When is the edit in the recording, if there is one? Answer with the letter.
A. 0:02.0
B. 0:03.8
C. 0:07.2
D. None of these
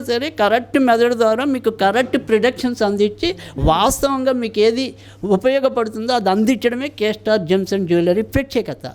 D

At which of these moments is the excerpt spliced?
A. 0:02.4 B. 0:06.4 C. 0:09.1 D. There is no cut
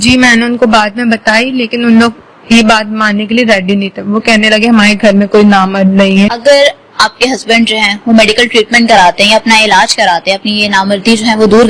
B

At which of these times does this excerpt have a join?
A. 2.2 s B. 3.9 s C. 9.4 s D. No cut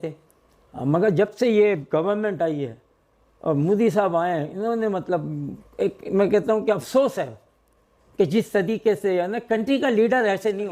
D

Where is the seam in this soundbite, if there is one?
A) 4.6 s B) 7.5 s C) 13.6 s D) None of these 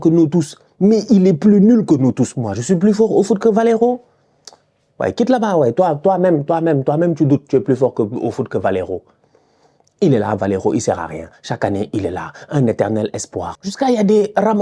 C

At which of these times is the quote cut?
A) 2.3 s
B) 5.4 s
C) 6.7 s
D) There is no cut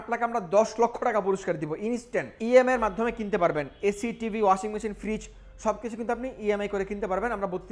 A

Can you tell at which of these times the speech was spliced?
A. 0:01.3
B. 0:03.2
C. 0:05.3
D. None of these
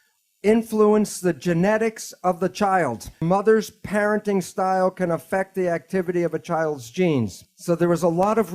B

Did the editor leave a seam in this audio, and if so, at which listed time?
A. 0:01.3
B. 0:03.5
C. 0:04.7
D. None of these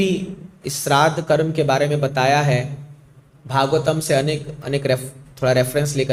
D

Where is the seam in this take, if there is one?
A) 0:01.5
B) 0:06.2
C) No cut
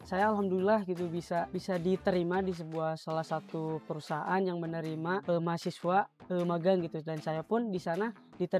A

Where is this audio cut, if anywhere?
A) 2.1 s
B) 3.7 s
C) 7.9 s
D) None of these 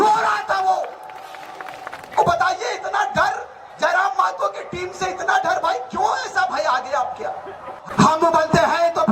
C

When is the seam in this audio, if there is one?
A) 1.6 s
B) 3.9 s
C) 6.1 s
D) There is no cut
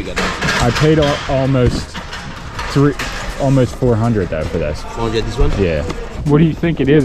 C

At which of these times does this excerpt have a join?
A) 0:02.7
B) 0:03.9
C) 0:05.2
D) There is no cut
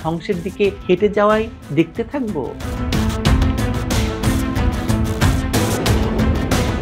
A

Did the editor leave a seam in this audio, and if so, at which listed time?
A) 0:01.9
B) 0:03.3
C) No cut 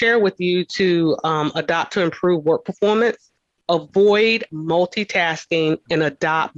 C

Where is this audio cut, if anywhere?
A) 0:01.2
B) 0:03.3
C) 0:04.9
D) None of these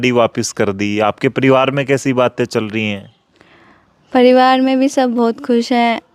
D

